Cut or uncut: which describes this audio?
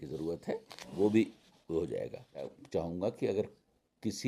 cut